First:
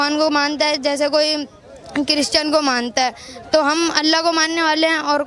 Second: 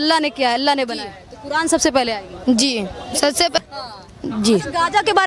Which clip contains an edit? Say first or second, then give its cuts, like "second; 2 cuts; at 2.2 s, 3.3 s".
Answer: second; 1 cut; at 3.6 s